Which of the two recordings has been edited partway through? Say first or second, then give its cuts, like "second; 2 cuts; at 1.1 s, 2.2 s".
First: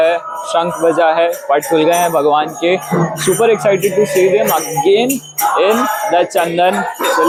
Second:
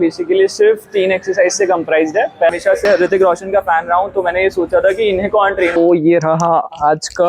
second; 2 cuts; at 2.5 s, 5.8 s